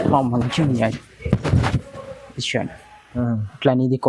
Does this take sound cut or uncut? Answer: cut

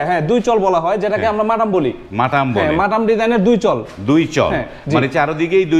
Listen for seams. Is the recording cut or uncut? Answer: uncut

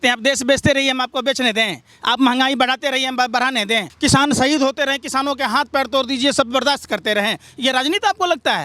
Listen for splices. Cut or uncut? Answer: uncut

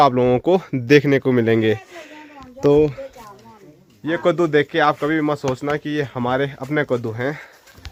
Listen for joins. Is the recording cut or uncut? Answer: uncut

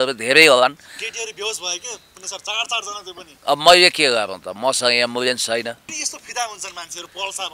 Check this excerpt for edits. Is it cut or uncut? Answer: cut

